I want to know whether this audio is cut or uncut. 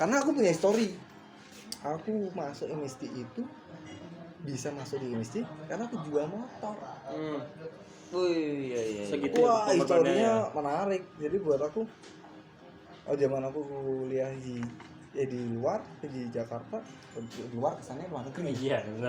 uncut